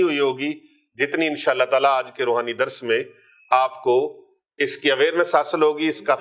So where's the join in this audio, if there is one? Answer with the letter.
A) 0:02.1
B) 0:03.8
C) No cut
C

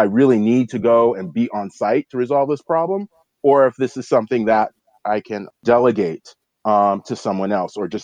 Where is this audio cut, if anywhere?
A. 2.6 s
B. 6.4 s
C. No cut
C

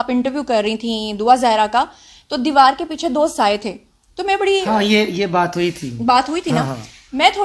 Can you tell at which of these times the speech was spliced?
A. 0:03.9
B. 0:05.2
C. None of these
C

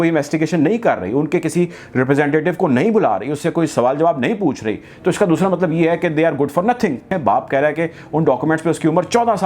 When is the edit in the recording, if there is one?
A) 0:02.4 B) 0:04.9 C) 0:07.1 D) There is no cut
C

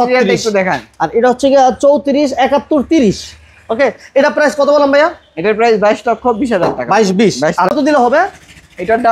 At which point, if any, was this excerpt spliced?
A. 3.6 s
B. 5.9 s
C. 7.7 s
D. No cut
C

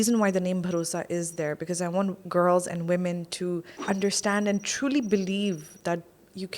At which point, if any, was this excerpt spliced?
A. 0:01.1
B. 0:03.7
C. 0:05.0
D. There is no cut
B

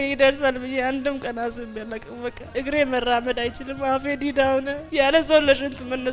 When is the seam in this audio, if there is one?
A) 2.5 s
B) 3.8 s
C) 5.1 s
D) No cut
A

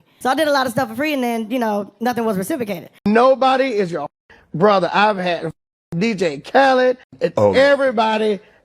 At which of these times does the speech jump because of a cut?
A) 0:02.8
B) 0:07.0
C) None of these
A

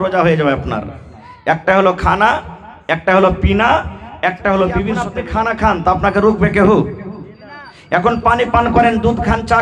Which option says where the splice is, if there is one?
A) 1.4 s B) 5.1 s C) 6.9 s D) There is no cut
B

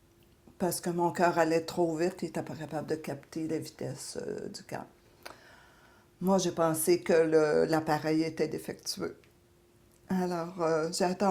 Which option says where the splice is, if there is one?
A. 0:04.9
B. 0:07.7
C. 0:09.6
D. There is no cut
D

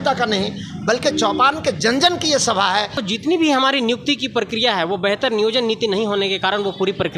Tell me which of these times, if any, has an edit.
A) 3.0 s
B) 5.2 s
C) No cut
A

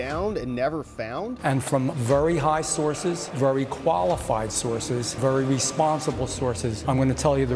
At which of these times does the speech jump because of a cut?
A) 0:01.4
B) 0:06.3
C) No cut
A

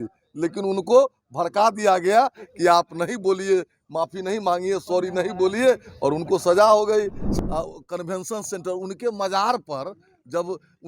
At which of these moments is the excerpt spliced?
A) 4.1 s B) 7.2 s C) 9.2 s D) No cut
B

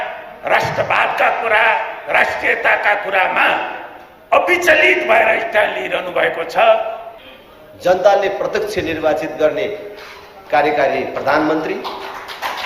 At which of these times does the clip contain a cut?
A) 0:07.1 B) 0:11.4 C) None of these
A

